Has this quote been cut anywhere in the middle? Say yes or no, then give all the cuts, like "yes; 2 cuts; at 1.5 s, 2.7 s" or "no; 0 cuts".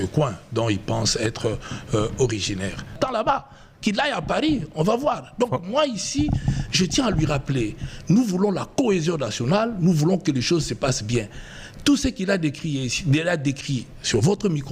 yes; 1 cut; at 3.0 s